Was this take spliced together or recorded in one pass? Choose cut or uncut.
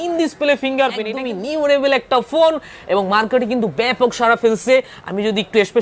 cut